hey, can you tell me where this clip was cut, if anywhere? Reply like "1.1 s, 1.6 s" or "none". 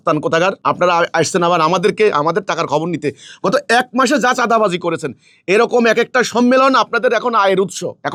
none